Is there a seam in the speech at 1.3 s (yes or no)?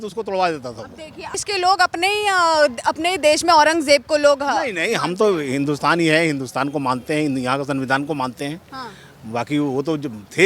yes